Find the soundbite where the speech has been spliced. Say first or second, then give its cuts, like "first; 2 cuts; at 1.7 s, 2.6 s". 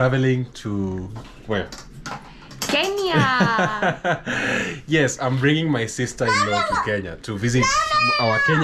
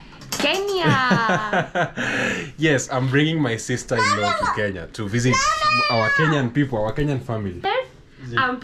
second; 1 cut; at 7.6 s